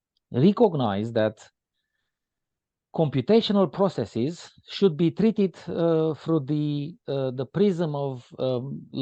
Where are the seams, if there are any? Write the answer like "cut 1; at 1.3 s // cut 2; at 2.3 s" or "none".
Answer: none